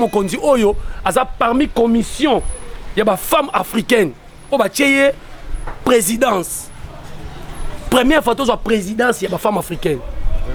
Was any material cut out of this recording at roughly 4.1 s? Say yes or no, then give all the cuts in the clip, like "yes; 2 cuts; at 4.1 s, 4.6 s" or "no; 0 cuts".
no; 0 cuts